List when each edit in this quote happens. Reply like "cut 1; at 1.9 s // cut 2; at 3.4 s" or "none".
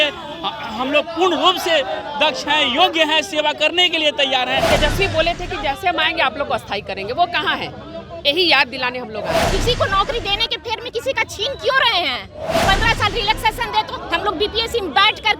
cut 1; at 4.7 s // cut 2; at 9.5 s // cut 3; at 12.6 s